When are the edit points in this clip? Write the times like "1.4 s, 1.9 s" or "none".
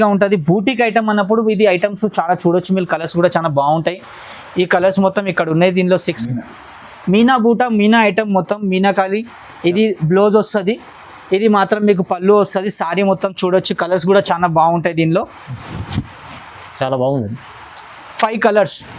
6.1 s

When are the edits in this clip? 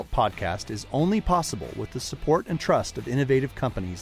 none

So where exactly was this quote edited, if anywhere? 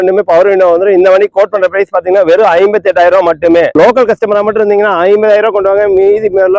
3.7 s

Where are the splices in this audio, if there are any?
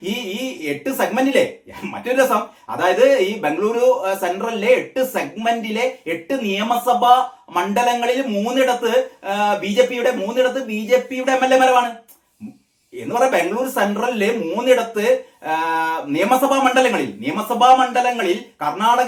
none

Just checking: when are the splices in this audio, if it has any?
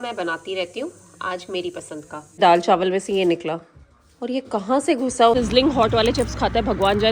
2.4 s, 5.3 s

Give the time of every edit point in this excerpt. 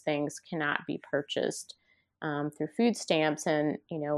none

